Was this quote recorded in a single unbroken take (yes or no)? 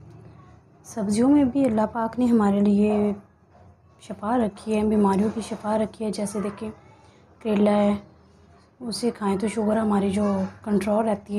yes